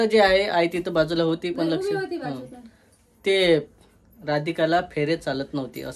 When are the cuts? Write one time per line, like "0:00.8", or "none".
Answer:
none